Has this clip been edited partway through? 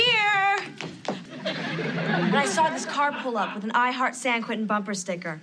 yes; 1 cut; at 1.2 s

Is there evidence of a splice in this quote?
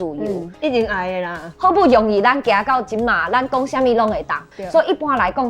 yes; 2 cuts; at 1.4 s, 4.4 s

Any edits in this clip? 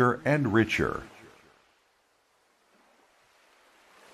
yes; 1 cut; at 1.5 s

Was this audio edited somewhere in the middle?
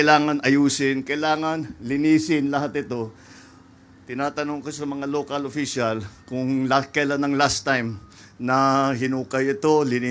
no; 0 cuts

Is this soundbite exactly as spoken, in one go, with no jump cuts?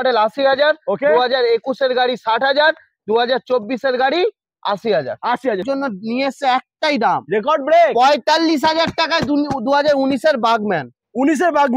no; 1 cut; at 5.6 s

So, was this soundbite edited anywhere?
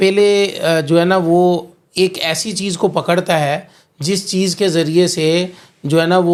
no; 0 cuts

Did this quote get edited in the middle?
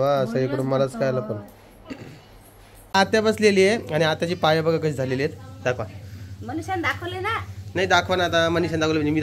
yes; 1 cut; at 2.7 s

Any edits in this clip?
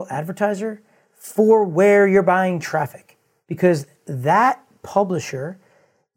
no; 0 cuts

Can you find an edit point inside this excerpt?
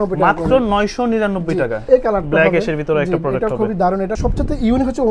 yes; 2 cuts; at 1.8 s, 4.2 s

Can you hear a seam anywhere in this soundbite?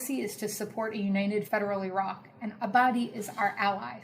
yes; 1 cut; at 1.5 s

